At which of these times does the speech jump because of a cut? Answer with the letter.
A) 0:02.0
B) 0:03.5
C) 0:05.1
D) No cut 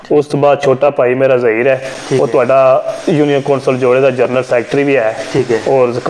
D